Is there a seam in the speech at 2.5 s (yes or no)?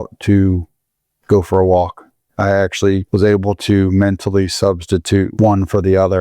yes